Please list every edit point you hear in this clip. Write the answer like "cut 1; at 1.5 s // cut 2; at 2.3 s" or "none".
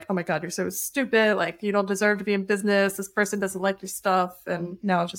none